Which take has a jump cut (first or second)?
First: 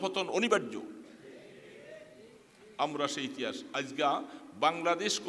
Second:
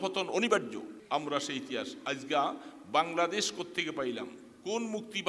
second